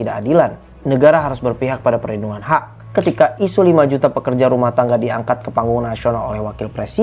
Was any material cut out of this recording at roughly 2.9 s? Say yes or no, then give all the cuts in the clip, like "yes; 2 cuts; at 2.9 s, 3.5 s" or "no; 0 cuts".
yes; 1 cut; at 2.9 s